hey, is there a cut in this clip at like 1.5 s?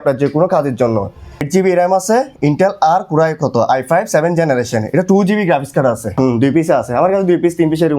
yes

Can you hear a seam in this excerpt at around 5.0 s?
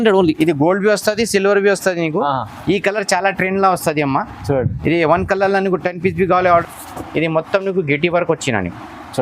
no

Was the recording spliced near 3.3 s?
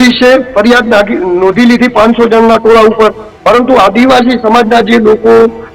yes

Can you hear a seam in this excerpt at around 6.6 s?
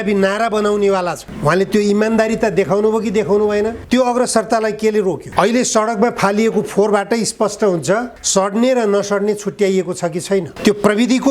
no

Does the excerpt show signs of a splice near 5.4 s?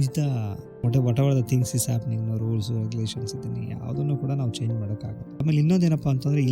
yes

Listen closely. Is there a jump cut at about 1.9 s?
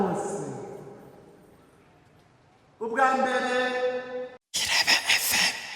no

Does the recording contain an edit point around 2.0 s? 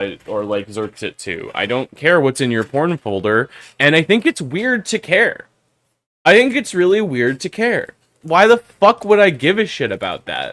no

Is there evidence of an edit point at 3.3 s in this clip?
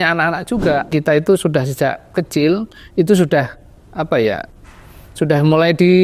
no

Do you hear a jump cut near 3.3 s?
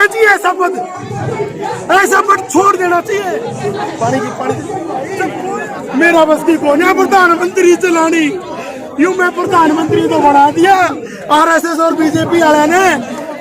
yes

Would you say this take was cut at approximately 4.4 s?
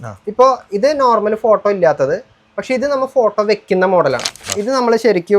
yes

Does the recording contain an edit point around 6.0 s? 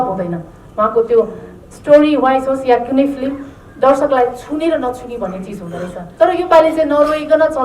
yes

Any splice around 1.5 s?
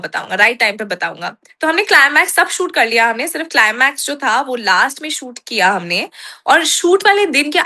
no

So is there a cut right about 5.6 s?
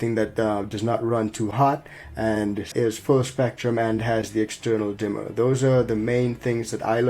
no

